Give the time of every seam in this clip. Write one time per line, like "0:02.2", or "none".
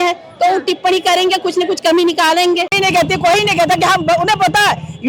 0:02.7